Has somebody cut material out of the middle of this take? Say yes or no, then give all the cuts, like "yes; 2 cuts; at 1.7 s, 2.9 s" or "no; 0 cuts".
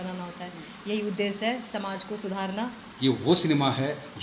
yes; 1 cut; at 2.8 s